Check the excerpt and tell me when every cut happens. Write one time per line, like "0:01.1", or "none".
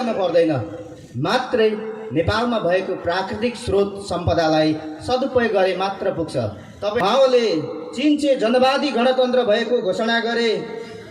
0:07.0

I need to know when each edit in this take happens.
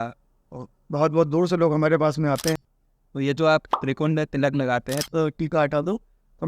0:02.7
0:05.0

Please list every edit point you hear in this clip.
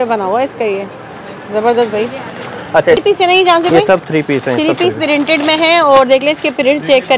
0:03.0

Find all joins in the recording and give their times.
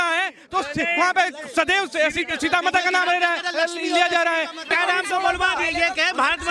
0:04.7

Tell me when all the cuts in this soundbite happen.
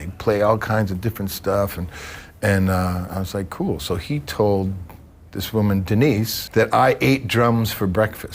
0:06.4

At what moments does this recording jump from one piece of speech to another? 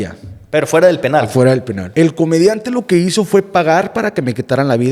0:01.8

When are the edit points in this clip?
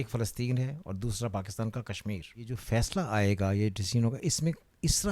0:02.6

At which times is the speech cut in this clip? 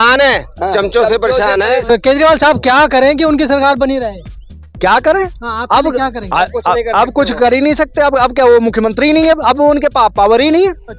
0:01.8

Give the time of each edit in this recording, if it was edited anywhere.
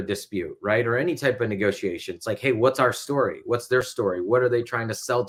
none

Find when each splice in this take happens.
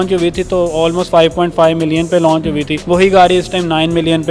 0:02.7

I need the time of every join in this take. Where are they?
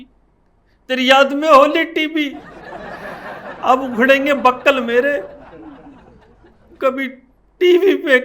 0:05.4
0:06.7

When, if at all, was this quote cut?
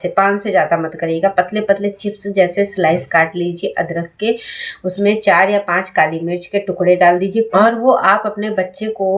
0:07.5

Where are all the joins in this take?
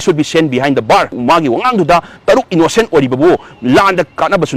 0:01.2

